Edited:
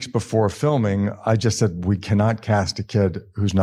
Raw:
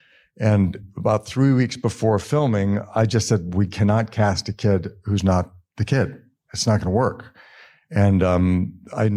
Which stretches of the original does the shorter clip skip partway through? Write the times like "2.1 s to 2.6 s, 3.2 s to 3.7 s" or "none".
none